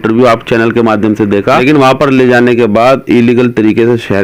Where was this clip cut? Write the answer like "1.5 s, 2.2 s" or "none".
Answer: 1.6 s

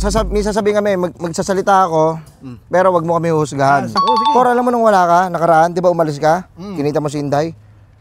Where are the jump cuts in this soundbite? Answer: 4.0 s

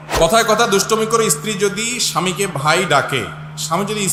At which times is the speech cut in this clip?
none

